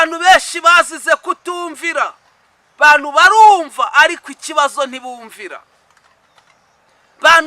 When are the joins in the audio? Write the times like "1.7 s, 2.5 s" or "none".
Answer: none